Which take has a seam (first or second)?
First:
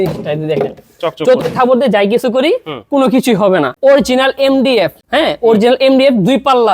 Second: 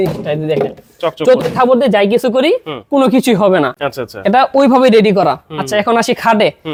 first